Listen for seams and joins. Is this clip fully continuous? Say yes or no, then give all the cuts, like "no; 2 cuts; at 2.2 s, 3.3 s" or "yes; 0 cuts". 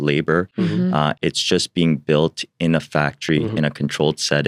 yes; 0 cuts